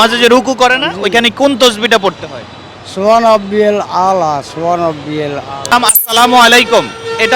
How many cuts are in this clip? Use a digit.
1